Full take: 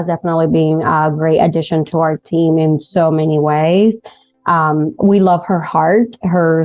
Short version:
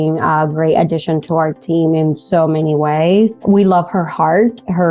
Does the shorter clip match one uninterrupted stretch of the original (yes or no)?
no